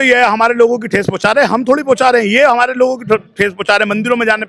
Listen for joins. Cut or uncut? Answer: uncut